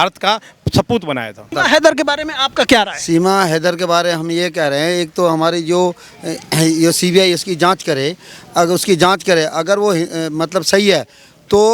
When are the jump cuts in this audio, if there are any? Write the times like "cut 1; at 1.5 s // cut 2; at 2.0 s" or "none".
cut 1; at 1.5 s